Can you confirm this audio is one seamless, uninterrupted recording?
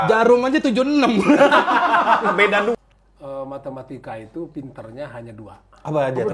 no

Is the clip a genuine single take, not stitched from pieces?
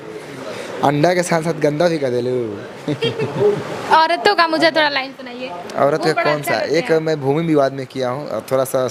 yes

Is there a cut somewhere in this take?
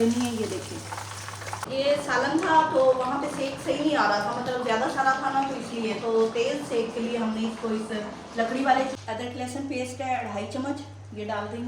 yes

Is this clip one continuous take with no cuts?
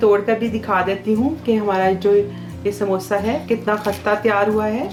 yes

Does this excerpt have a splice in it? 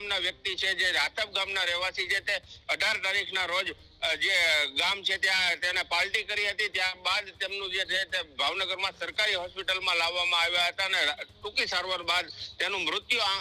no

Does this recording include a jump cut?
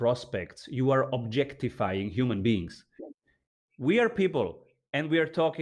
yes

